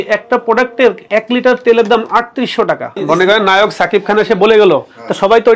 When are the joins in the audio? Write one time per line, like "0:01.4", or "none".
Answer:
0:01.0
0:02.9